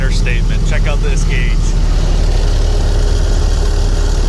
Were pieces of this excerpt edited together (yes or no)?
no